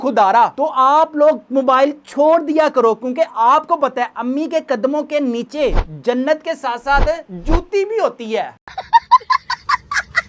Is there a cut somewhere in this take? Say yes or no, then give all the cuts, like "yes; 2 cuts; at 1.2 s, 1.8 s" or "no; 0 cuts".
no; 0 cuts